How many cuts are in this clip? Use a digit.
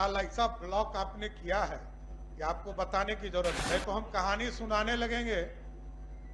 1